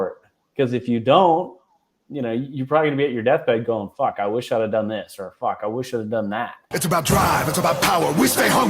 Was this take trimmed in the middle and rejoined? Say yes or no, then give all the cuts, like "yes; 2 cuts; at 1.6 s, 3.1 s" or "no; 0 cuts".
yes; 1 cut; at 6.6 s